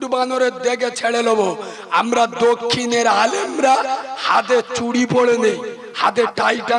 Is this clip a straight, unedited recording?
yes; 0 cuts

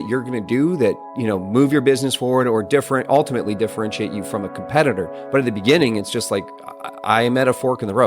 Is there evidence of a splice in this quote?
yes; 1 cut; at 1.1 s

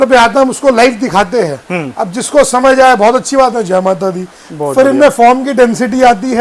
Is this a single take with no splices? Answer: yes; 0 cuts

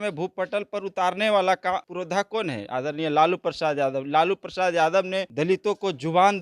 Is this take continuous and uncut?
no; 2 cuts; at 1.9 s, 5.3 s

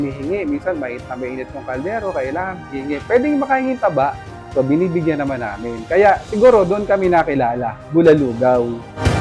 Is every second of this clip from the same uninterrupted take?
yes; 0 cuts

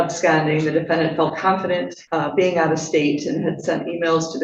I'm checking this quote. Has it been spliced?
no; 0 cuts

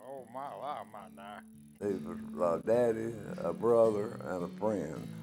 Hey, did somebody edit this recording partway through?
yes; 1 cut; at 1.7 s

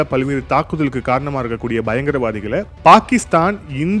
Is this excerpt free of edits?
no; 1 cut; at 2.7 s

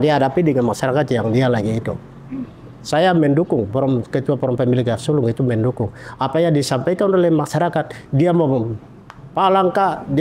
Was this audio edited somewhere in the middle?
no; 0 cuts

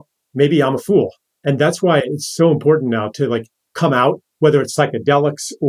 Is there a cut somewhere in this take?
yes; 1 cut; at 1.3 s

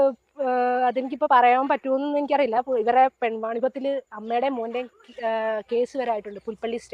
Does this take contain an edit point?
no; 0 cuts

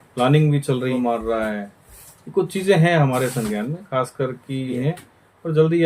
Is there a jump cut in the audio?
yes; 2 cuts; at 1.0 s, 4.7 s

